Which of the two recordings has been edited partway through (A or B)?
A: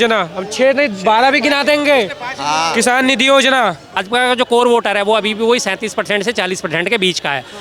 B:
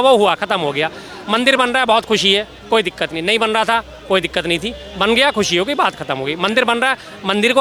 A